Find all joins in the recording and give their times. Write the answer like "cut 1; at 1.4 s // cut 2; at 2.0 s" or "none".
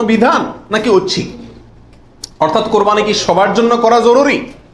none